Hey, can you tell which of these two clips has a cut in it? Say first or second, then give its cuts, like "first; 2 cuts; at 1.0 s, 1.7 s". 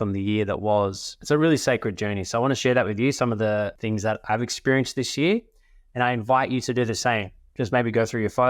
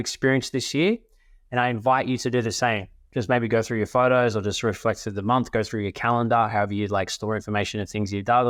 first; 2 cuts; at 1.1 s, 2.6 s